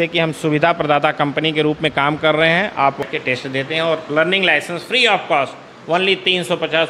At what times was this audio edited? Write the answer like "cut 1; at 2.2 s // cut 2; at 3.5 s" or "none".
cut 1; at 3.0 s